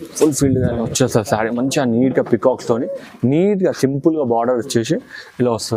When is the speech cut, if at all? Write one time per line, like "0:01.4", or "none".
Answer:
none